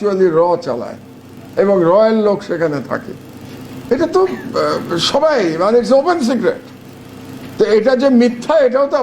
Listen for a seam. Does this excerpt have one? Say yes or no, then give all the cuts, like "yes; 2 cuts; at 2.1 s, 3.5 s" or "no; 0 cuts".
no; 0 cuts